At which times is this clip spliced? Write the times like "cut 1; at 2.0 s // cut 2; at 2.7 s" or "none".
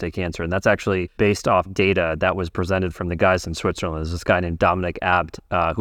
cut 1; at 1.1 s